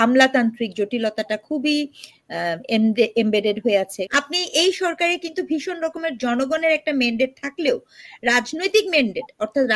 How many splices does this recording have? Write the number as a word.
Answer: one